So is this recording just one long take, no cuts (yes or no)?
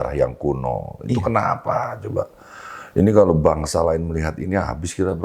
yes